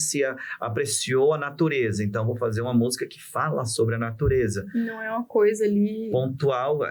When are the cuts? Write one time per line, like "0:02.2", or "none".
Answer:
none